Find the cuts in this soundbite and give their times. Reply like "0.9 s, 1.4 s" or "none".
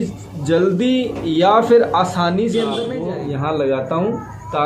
2.9 s